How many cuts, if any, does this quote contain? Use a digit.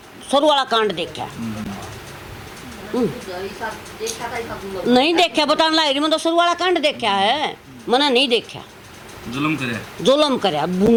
0